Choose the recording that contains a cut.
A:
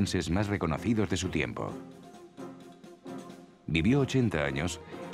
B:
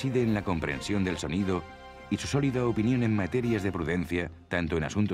B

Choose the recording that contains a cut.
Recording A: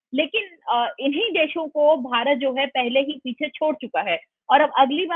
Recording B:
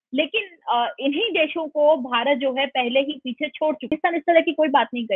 B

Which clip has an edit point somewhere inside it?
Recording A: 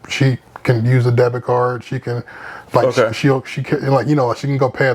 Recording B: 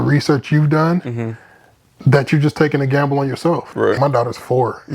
B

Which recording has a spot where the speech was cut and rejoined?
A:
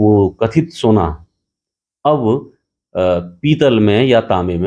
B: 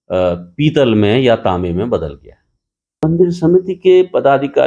B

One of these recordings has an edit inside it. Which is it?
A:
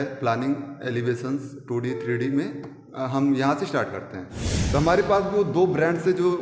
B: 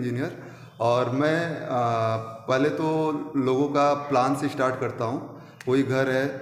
A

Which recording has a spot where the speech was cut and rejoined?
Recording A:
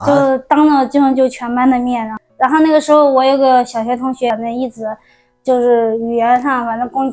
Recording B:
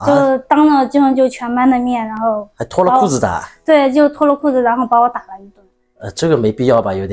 A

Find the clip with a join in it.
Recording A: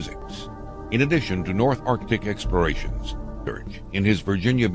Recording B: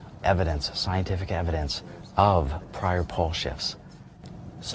A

